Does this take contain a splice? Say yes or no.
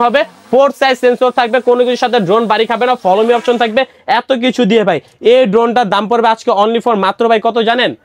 no